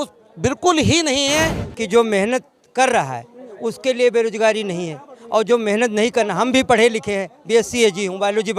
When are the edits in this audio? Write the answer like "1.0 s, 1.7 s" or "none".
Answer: 1.6 s